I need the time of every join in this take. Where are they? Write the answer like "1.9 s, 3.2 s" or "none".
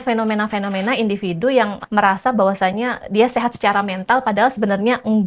1.8 s